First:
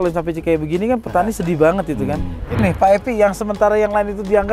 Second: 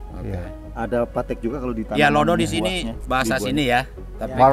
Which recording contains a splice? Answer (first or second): first